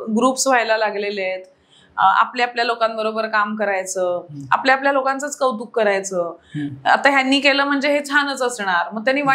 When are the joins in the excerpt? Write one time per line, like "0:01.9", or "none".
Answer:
none